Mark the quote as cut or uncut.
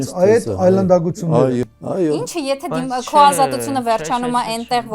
cut